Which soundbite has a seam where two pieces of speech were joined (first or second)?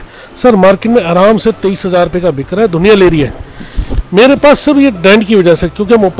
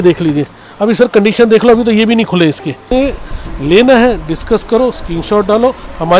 second